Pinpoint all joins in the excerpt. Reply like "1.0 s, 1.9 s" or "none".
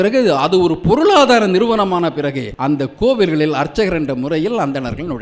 2.5 s